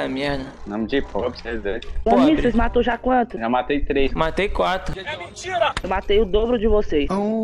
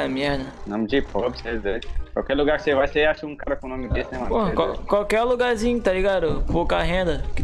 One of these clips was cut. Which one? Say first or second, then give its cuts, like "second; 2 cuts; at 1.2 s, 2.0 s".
first; 1 cut; at 2.0 s